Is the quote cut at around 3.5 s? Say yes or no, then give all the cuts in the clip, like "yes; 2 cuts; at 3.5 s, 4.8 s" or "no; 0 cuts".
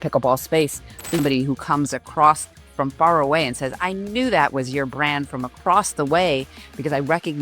no; 1 cut; at 1.2 s